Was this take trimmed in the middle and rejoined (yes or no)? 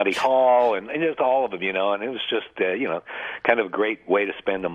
no